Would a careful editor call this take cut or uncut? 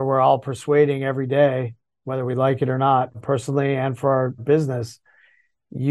cut